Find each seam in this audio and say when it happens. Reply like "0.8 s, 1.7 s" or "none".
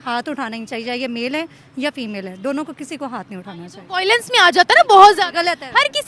none

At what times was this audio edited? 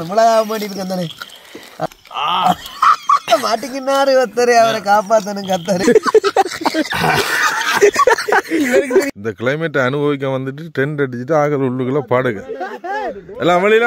1.9 s, 5.8 s, 9.1 s

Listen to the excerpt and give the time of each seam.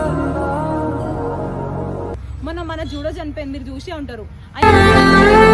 2.1 s

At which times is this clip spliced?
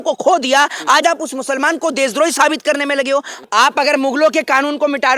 3.4 s

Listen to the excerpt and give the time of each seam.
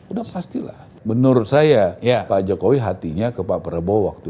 0.9 s

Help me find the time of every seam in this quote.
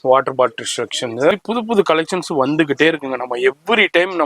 1.3 s

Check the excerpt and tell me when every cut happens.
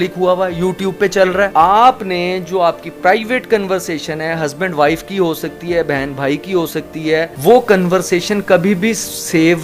1.5 s, 7.3 s

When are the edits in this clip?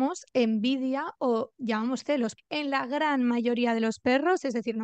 2.3 s

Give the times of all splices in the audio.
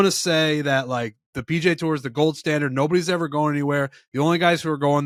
none

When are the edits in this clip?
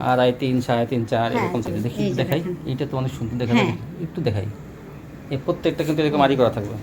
1.7 s

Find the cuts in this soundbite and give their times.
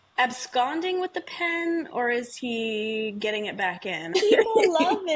4.1 s

